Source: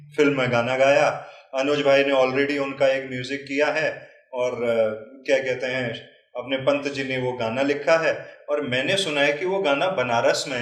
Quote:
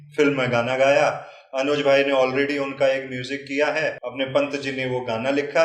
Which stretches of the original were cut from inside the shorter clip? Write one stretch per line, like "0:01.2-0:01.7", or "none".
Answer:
0:04.0-0:06.4